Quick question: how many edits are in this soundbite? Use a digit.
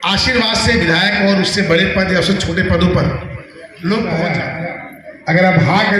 1